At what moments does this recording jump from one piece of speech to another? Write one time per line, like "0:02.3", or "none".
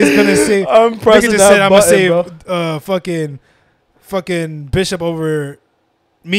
none